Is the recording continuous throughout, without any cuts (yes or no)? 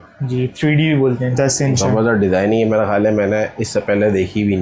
no